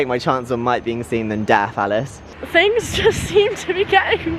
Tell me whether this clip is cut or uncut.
cut